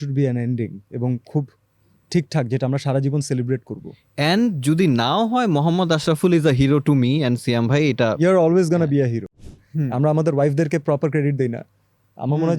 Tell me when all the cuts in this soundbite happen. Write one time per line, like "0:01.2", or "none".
0:09.4